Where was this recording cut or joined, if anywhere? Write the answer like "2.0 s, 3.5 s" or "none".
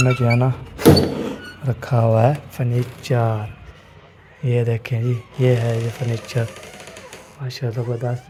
none